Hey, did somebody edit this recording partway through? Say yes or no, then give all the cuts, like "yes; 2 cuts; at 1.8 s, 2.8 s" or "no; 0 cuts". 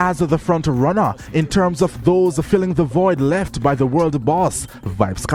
no; 0 cuts